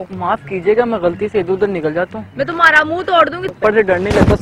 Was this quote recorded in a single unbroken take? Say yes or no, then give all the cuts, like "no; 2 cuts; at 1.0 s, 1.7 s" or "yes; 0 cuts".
no; 1 cut; at 3.5 s